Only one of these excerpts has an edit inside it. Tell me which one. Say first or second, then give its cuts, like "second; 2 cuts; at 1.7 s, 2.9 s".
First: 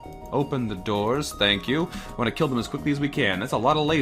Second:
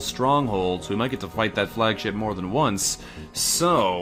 first; 1 cut; at 2.0 s